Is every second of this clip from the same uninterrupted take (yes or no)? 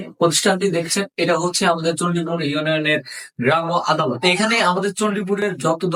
yes